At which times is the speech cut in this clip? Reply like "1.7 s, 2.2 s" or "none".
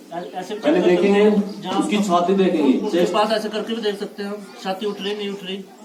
none